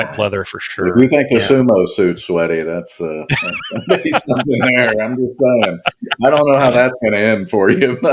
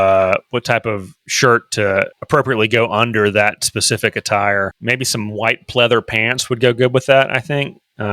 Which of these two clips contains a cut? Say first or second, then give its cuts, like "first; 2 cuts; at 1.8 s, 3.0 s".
second; 2 cuts; at 2.2 s, 4.8 s